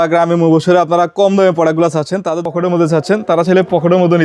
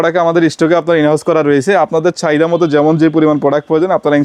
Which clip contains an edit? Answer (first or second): first